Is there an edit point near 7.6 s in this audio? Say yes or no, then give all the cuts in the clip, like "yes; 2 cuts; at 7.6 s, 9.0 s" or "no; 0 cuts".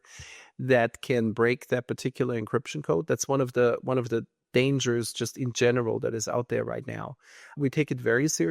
yes; 1 cut; at 7.6 s